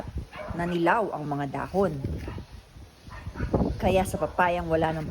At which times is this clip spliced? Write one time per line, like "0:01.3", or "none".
0:02.0
0:03.8